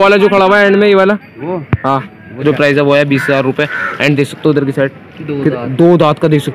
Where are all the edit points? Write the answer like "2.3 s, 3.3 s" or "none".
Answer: 2.4 s